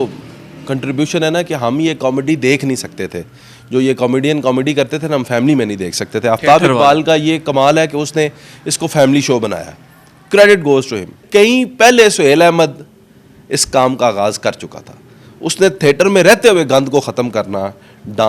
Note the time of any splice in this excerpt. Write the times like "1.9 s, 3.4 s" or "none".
11.1 s